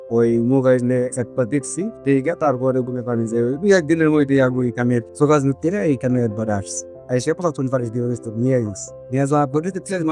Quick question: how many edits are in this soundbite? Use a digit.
0